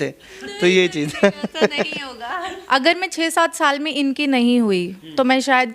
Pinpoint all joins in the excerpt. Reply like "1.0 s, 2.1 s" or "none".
2.5 s